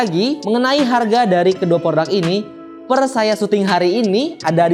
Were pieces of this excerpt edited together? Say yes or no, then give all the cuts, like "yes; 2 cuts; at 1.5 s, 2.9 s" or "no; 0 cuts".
no; 0 cuts